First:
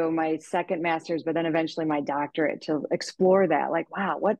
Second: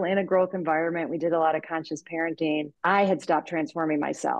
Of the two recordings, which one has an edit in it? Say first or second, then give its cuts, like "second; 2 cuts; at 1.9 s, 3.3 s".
second; 1 cut; at 2.7 s